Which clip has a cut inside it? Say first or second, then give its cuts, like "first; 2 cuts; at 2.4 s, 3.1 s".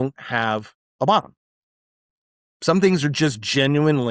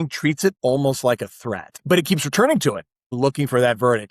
second; 2 cuts; at 1.8 s, 3.1 s